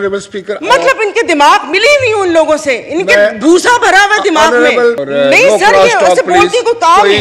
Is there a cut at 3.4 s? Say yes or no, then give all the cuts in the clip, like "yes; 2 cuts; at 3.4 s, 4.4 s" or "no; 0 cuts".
no; 1 cut; at 5.0 s